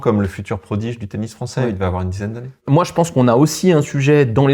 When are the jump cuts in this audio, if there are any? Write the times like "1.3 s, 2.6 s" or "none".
2.6 s